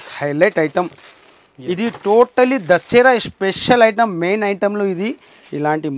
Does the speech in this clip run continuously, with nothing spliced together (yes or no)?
yes